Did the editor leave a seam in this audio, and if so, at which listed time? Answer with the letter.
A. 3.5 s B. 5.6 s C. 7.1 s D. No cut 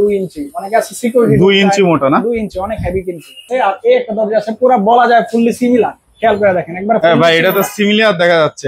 A